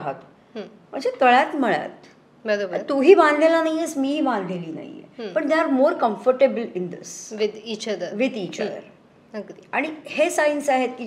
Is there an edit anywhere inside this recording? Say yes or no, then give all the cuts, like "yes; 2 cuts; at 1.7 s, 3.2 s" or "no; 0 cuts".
no; 0 cuts